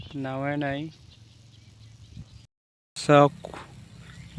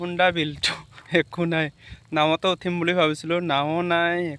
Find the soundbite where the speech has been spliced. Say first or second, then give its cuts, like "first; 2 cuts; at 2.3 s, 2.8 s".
first; 1 cut; at 2.6 s